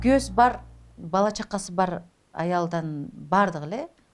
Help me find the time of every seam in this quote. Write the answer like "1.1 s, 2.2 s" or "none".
none